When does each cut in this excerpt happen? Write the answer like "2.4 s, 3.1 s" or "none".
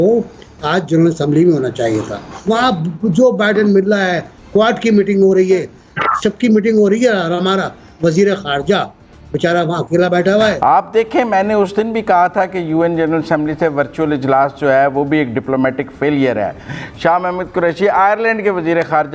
2.3 s, 10.6 s